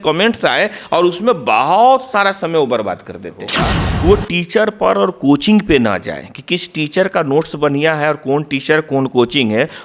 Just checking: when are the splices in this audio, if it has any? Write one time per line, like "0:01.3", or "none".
0:03.5